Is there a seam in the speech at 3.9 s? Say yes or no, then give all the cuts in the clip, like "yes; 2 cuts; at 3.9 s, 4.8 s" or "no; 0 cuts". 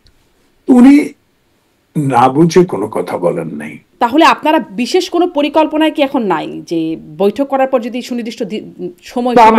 yes; 1 cut; at 3.9 s